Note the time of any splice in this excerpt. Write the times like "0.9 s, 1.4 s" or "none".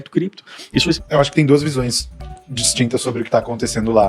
1.0 s